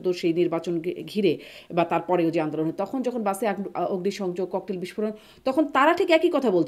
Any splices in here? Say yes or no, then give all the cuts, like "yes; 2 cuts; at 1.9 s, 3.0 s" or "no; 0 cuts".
no; 0 cuts